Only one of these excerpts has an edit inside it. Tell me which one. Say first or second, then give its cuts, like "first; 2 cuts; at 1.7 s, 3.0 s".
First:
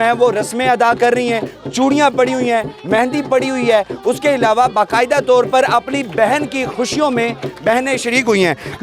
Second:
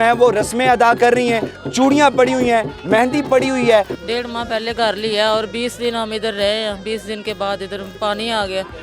second; 2 cuts; at 3.9 s, 7.9 s